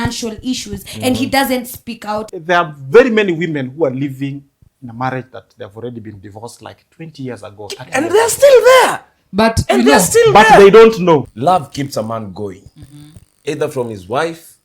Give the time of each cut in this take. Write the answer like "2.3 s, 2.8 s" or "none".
2.3 s, 11.2 s